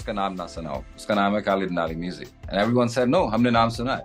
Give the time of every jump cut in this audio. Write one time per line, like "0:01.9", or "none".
none